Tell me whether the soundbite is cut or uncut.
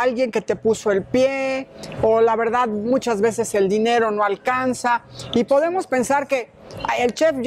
uncut